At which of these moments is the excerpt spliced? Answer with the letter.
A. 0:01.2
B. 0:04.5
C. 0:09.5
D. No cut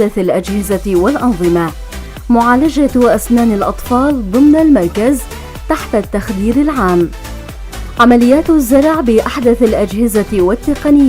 C